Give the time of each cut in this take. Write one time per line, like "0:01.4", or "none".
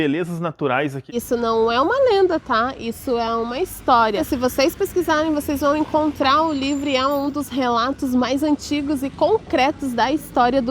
0:01.1
0:04.2

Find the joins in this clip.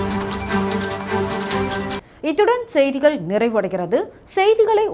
none

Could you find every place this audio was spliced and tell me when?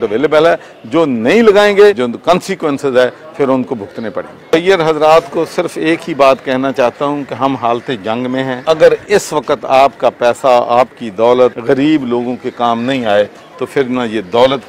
0:02.0
0:04.5
0:08.6
0:11.6

